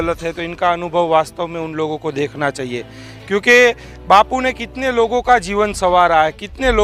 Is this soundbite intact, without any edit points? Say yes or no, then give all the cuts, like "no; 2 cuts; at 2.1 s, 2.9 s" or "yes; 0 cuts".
yes; 0 cuts